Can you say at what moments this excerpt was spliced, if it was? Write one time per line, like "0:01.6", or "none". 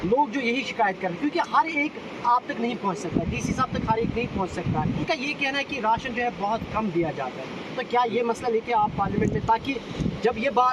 none